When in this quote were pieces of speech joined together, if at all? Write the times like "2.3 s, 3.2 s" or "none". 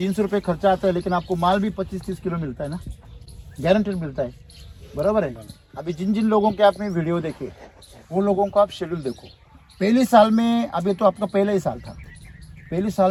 none